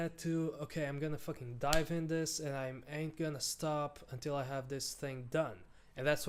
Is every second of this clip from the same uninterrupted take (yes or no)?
yes